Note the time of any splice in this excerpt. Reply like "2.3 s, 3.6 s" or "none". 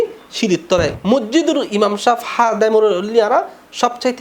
0.9 s